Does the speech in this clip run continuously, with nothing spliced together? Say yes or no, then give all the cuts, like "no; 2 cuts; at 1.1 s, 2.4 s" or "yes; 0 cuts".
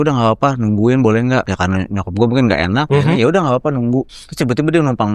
no; 3 cuts; at 1.5 s, 2.9 s, 4.2 s